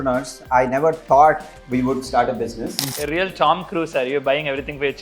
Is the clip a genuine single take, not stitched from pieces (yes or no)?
no